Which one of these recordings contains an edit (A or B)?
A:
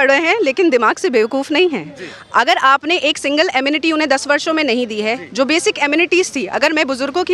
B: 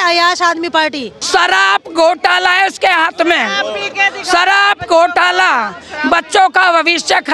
B